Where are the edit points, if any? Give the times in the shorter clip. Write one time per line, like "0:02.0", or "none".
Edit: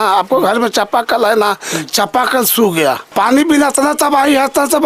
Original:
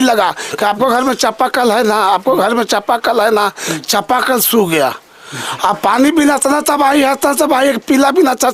0:03.1

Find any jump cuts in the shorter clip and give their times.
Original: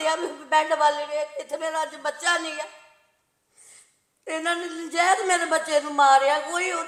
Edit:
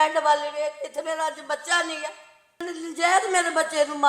0:02.6

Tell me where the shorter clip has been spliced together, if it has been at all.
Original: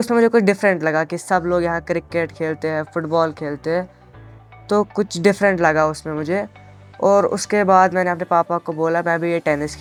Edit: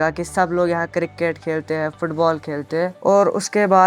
0:02.9

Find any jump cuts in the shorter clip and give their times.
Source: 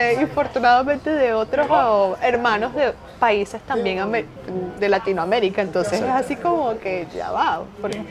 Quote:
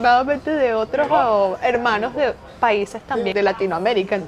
0:03.3

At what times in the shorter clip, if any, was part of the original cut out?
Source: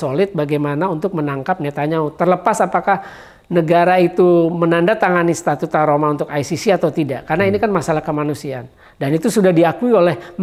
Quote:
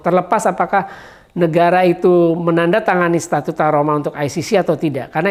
none

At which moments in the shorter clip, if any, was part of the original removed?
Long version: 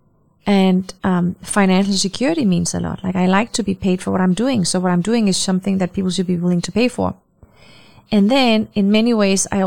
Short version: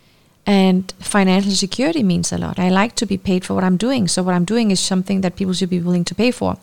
0:00.9
0:02.5

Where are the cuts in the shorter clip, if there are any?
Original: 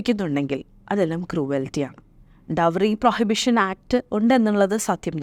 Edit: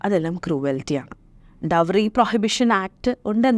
none

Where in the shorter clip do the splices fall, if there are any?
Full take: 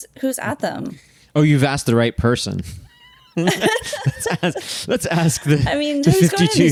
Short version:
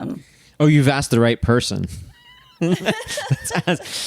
none

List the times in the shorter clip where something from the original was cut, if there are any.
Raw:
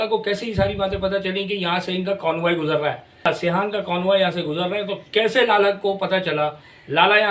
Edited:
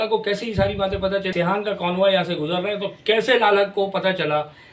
0:01.3

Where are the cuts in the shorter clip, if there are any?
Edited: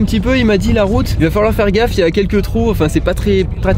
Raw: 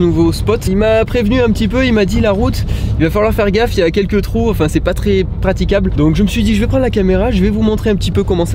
0:01.1

